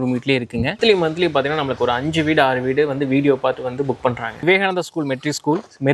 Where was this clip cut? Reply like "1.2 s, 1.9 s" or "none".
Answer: 0.8 s, 4.4 s